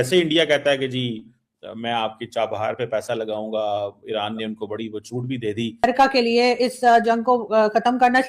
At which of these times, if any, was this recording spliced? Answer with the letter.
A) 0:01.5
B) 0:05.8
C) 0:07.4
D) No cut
B